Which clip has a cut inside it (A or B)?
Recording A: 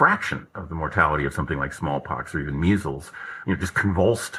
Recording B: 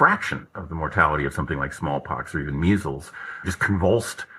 B